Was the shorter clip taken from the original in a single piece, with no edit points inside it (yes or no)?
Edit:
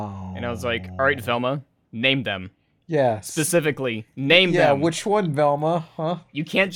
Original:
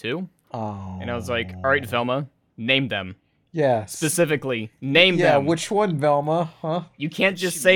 yes